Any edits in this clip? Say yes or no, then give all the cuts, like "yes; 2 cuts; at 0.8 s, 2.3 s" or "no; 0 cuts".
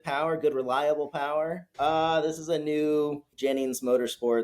yes; 2 cuts; at 1.6 s, 3.2 s